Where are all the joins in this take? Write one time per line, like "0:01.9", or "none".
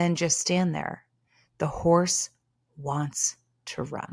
none